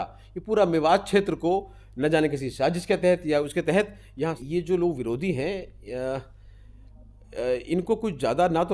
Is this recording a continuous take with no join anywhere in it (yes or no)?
no